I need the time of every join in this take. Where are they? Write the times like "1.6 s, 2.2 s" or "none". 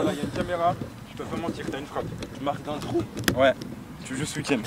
2.3 s